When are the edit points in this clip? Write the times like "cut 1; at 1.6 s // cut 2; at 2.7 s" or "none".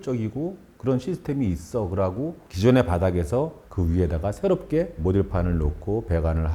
cut 1; at 2.5 s